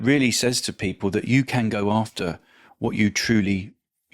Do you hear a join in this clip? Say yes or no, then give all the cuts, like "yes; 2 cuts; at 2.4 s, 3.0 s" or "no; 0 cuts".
no; 0 cuts